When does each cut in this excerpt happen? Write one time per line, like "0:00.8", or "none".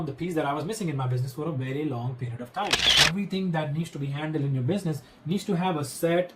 0:03.0

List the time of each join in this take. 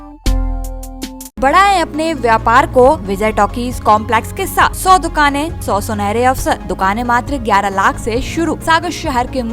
0:01.4
0:03.1
0:04.8
0:05.6
0:06.7
0:08.6

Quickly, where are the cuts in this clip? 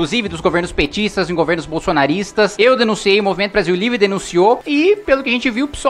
none

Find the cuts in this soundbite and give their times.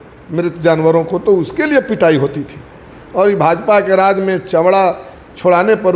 none

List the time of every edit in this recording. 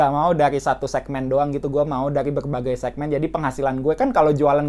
none

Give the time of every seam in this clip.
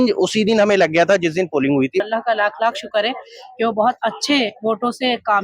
0:02.0

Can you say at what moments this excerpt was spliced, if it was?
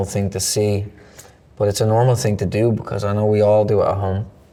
none

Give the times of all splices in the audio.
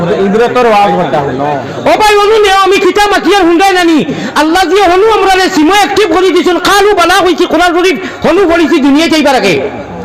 none

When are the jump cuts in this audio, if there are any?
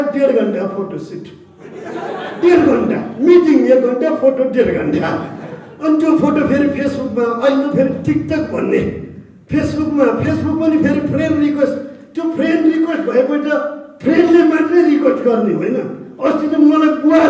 none

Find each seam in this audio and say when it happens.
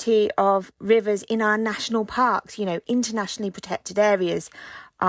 none

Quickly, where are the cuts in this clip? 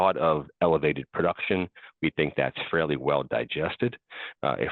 none

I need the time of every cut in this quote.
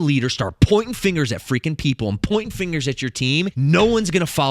0:03.5

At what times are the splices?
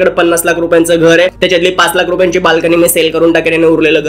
0:01.3

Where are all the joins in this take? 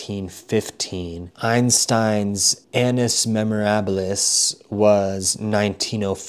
0:01.3
0:02.5

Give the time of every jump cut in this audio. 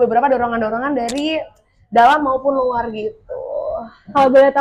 none

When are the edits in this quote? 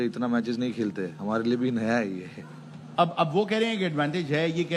none

